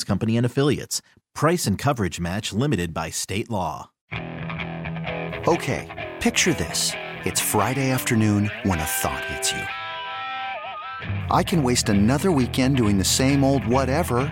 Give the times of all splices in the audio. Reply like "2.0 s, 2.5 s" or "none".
4.0 s